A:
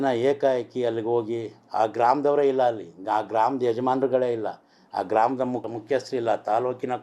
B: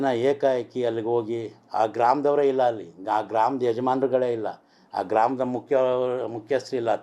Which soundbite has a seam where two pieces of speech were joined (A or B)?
A